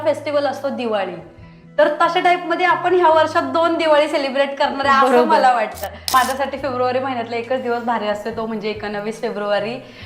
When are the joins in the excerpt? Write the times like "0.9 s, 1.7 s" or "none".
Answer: 6.1 s